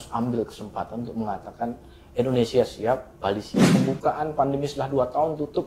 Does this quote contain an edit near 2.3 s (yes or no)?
no